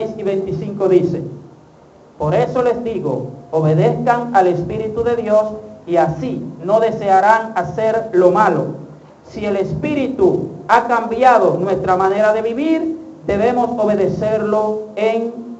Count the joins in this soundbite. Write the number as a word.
one